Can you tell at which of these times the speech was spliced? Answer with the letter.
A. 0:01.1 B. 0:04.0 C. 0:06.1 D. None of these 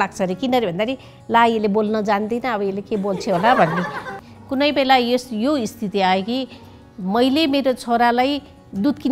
B